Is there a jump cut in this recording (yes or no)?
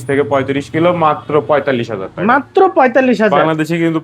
no